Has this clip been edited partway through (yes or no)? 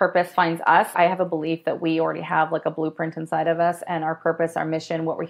yes